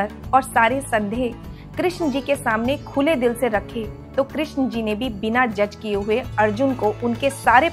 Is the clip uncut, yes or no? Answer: yes